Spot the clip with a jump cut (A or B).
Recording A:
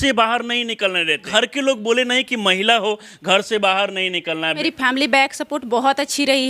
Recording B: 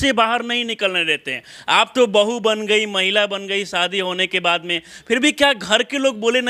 A